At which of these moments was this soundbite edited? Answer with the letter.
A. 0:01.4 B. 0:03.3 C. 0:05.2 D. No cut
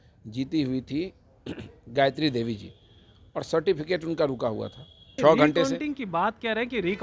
C